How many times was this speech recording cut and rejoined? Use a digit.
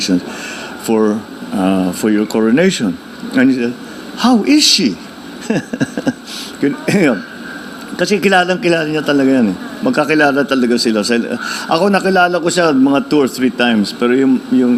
0